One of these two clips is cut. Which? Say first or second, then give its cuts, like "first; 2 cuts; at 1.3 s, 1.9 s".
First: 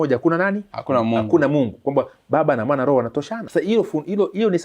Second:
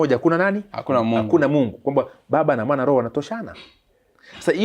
first; 1 cut; at 3.4 s